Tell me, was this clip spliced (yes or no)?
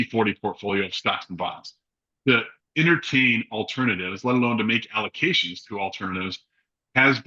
no